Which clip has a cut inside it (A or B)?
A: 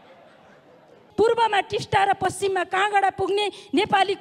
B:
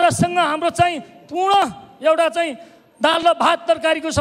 A